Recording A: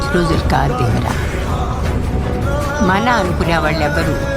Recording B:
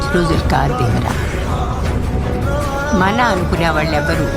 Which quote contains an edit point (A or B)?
A